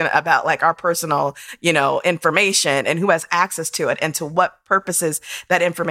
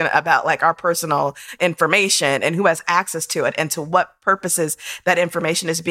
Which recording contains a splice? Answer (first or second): second